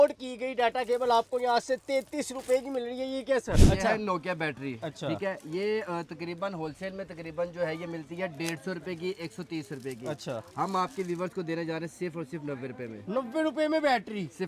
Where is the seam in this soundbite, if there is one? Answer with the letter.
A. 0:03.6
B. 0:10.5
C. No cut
A